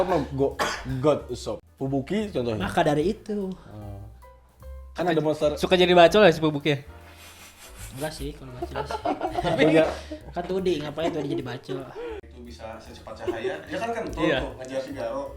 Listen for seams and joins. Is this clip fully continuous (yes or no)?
no